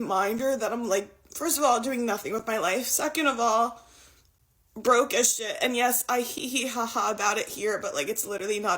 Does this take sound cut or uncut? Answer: cut